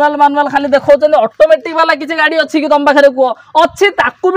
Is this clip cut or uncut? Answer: uncut